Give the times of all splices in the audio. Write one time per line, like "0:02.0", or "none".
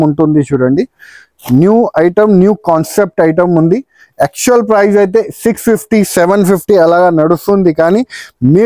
none